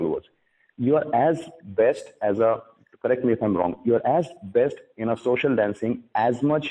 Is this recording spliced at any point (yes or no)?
no